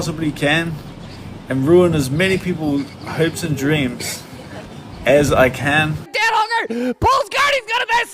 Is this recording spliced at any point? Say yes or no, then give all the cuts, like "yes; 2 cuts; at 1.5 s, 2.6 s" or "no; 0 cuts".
yes; 1 cut; at 6.1 s